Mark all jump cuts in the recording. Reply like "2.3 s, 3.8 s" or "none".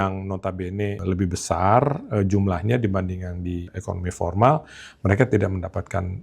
1.0 s, 3.7 s